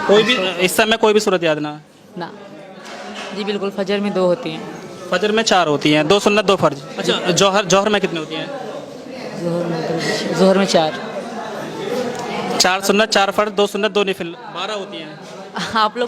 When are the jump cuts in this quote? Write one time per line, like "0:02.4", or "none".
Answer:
0:02.5
0:06.9